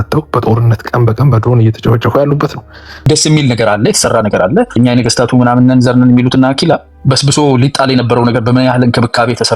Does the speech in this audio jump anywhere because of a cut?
yes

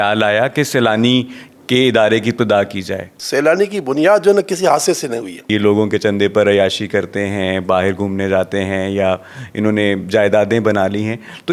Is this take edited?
yes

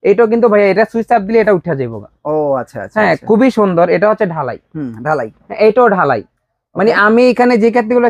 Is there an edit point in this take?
no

